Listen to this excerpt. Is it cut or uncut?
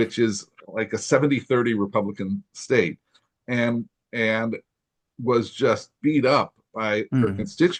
uncut